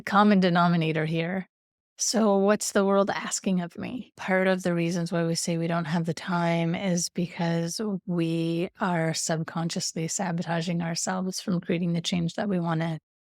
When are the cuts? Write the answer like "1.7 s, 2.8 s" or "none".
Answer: 4.2 s